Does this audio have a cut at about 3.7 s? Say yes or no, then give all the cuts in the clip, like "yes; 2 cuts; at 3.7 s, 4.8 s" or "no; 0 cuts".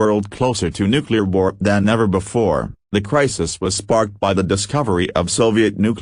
no; 1 cut; at 1.5 s